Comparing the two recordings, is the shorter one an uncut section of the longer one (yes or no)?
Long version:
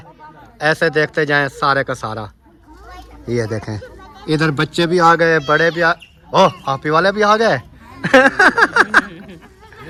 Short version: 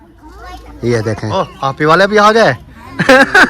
no